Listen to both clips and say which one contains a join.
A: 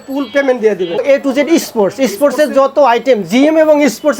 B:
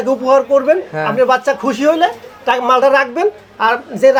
A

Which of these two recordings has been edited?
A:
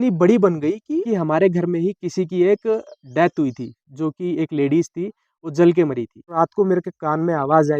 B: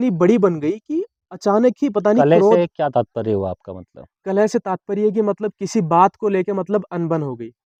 A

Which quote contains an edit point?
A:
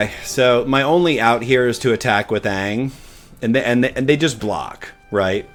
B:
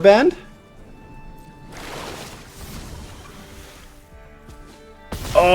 B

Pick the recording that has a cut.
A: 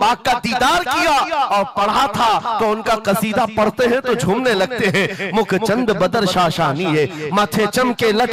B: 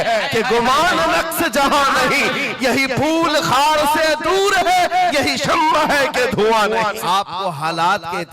B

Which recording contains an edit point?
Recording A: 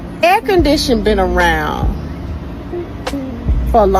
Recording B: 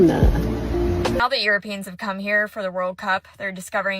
B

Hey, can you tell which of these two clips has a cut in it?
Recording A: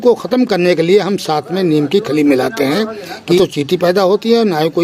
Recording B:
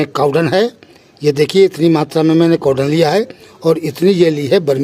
A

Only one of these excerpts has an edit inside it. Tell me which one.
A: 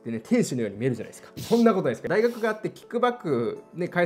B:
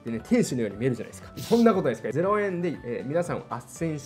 A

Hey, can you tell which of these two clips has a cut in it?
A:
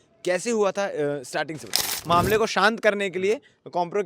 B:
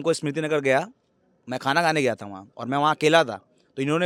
A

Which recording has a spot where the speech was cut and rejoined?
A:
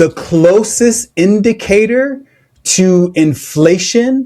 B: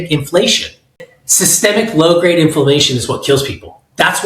B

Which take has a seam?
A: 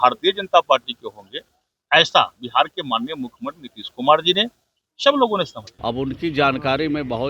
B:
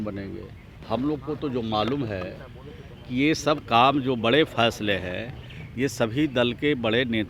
A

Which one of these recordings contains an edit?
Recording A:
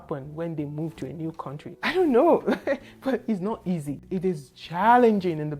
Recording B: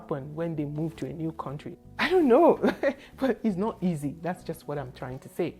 A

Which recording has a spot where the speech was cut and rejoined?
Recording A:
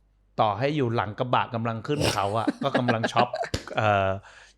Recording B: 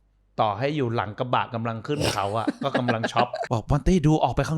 B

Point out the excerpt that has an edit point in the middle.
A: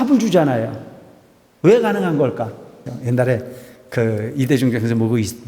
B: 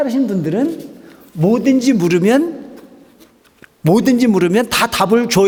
A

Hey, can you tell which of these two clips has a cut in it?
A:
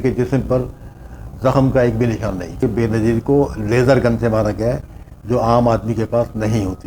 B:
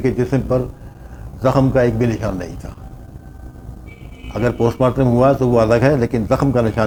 A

